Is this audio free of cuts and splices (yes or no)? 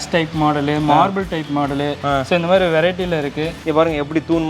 no